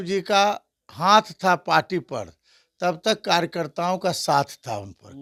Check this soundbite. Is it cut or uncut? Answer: uncut